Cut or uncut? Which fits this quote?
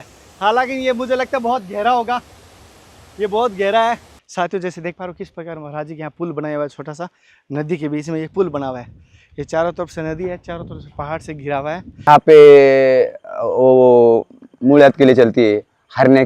cut